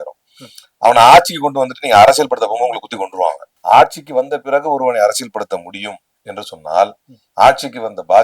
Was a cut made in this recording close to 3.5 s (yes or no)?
yes